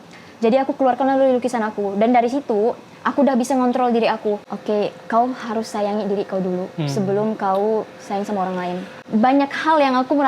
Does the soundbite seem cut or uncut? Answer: cut